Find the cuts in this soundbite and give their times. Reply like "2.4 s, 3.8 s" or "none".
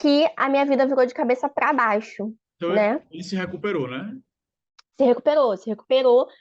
none